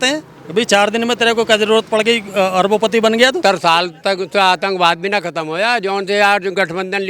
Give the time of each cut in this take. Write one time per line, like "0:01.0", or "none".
0:03.4